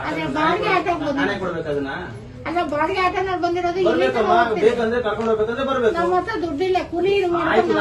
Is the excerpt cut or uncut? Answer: uncut